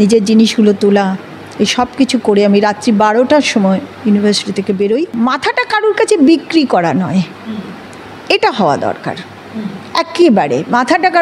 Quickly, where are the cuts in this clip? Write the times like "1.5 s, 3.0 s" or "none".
5.1 s